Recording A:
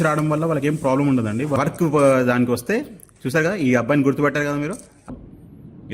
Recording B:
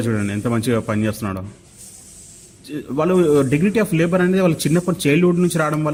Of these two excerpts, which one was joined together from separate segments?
A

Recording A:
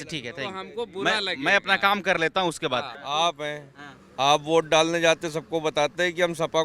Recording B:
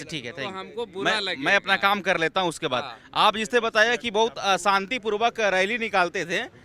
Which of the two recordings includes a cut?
A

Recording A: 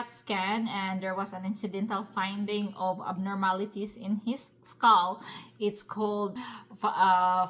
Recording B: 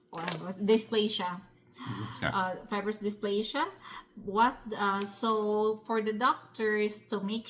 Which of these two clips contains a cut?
A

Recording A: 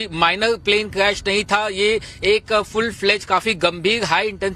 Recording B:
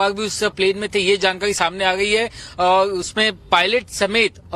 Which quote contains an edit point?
B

